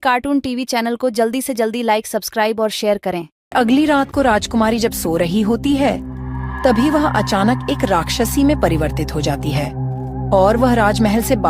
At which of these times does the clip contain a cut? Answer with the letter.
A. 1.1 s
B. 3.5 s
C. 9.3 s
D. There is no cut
B